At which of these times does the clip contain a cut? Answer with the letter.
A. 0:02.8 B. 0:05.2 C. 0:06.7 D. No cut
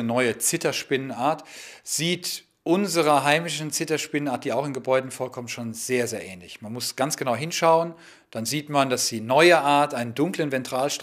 A